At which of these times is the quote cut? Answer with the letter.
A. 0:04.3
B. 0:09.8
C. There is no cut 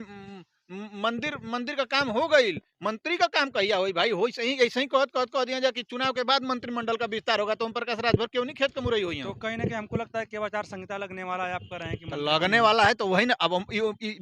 C